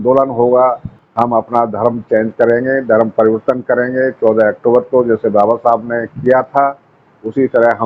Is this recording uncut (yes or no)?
no